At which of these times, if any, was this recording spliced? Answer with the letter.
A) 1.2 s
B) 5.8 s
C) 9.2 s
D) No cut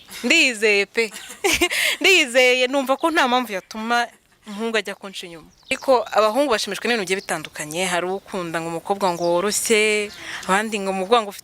B